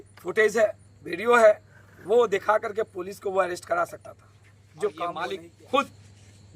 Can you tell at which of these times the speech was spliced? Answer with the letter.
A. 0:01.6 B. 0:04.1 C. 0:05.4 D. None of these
C